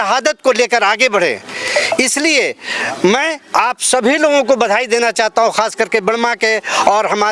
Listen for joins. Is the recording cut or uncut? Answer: uncut